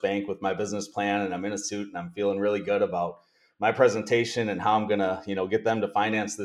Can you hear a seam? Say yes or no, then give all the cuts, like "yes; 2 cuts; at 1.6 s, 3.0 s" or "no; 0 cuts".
no; 0 cuts